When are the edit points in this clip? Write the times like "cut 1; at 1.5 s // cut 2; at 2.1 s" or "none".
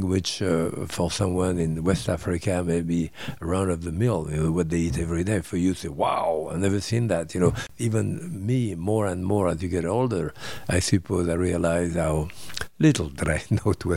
cut 1; at 7.7 s